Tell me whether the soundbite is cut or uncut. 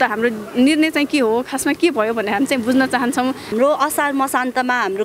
cut